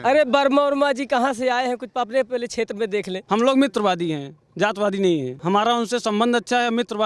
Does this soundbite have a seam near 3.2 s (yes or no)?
yes